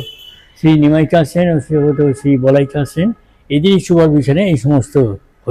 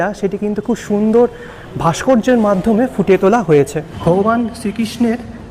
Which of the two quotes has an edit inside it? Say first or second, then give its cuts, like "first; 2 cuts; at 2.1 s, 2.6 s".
second; 1 cut; at 3.9 s